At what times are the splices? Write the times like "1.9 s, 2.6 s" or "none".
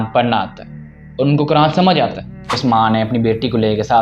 2.6 s